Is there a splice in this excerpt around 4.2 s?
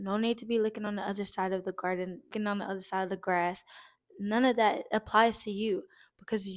no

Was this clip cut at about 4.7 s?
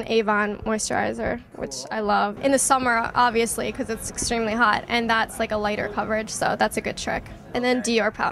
no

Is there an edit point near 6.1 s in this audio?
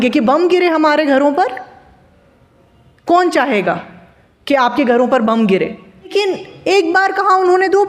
yes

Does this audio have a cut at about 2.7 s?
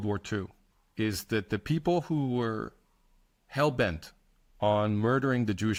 no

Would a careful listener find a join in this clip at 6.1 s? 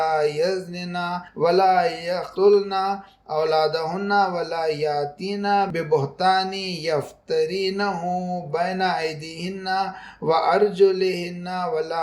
no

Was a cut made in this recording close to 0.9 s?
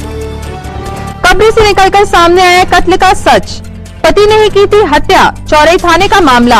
yes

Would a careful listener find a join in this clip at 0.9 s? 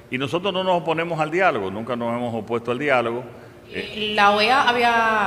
no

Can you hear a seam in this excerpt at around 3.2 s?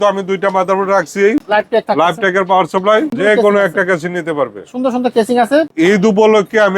yes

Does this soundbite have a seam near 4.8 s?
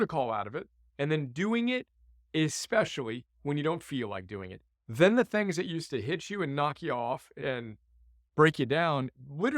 no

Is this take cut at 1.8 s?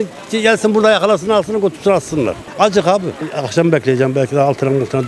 no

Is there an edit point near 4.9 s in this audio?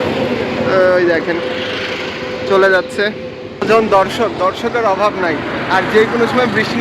no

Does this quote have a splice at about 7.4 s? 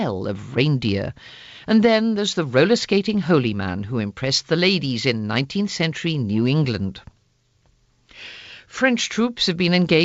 no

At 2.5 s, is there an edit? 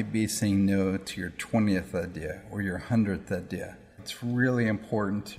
no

